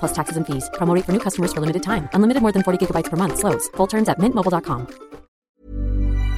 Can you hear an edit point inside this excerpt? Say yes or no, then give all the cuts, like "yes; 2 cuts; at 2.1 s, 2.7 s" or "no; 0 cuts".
yes; 1 cut; at 5.5 s